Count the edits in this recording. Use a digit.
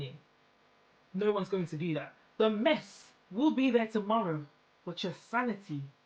1